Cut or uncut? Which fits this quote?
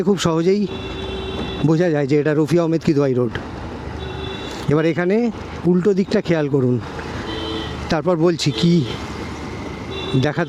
uncut